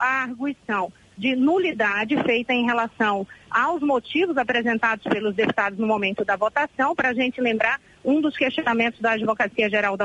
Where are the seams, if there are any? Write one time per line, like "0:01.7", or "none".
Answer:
none